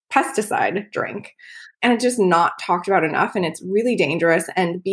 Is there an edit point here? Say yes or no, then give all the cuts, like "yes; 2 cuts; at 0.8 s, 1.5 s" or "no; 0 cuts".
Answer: yes; 1 cut; at 1.7 s